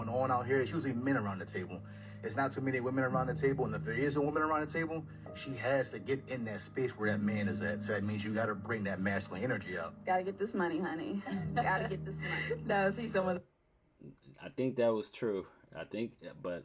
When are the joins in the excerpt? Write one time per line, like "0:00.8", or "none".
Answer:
none